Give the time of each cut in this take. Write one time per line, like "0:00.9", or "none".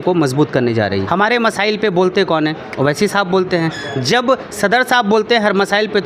0:01.0